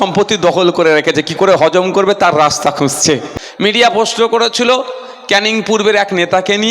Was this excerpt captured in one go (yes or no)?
no